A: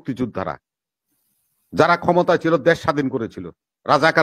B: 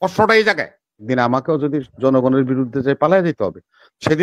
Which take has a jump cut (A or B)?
B